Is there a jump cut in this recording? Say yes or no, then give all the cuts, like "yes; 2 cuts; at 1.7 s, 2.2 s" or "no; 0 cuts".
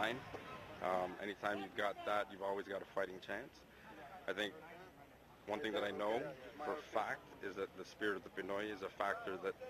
no; 0 cuts